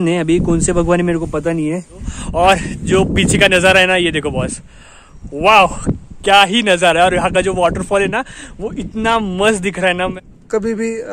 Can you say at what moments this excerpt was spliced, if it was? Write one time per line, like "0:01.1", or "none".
0:02.1
0:10.1